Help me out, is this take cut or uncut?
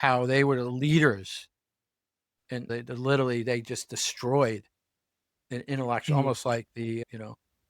cut